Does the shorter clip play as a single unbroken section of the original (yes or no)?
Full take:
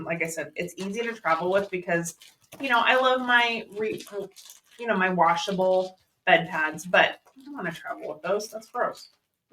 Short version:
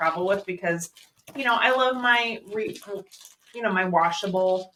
yes